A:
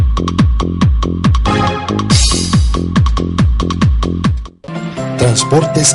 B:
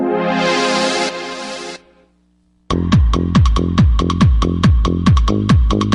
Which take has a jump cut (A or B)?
A